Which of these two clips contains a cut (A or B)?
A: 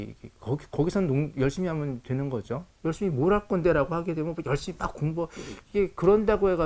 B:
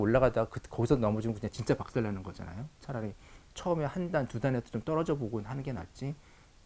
A